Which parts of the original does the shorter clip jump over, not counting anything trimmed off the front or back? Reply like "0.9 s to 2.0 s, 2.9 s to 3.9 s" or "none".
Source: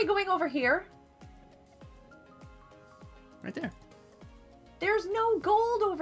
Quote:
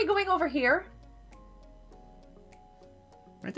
none